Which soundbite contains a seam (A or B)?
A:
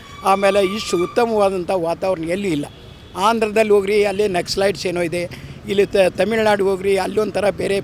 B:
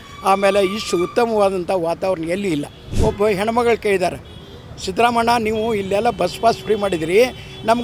B